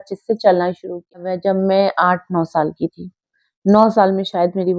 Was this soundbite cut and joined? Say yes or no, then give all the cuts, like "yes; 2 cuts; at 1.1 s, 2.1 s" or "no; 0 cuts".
yes; 1 cut; at 1.3 s